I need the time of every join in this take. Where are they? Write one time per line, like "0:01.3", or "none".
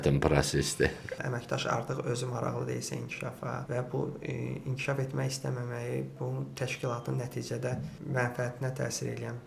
0:01.1
0:03.6

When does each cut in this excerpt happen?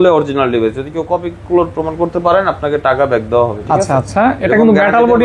none

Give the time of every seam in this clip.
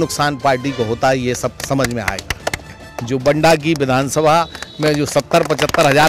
0:02.7

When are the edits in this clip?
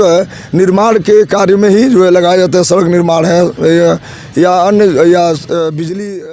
none

